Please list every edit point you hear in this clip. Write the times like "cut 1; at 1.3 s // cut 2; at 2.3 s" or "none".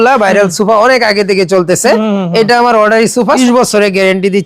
cut 1; at 3.4 s